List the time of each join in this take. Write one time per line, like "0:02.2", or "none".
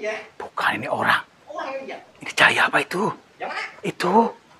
0:02.2